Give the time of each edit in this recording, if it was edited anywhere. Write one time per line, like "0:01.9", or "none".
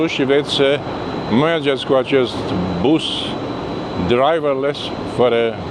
none